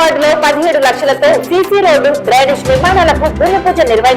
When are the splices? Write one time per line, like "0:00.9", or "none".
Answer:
none